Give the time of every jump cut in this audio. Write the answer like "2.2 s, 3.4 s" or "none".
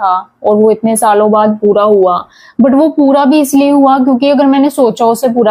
none